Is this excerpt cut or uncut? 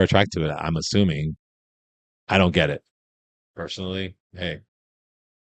uncut